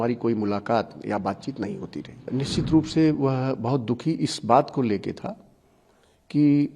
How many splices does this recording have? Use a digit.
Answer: 1